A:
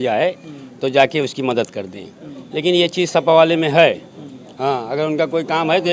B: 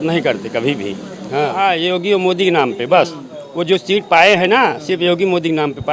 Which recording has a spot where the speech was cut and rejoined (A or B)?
B